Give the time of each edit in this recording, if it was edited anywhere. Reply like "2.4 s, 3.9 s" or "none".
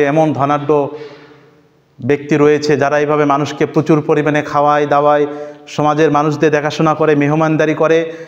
none

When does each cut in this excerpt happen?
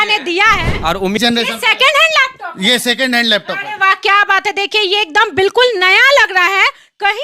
1.2 s

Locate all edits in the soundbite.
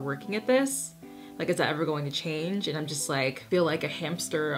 3.4 s

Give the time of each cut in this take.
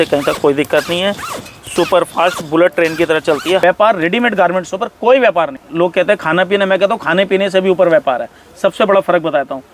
3.6 s, 5.6 s

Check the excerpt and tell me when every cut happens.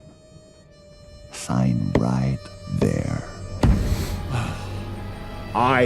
4.2 s

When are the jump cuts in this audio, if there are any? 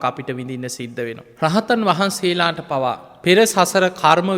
1.2 s, 3.1 s

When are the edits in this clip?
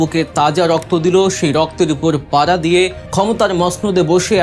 3.0 s

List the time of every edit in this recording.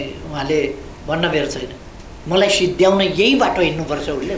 none

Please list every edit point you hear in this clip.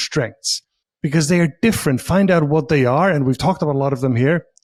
none

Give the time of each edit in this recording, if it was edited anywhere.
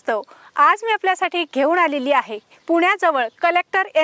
none

